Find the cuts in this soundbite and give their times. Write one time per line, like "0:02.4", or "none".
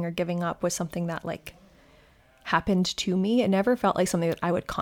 none